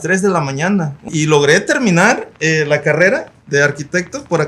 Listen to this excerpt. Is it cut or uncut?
cut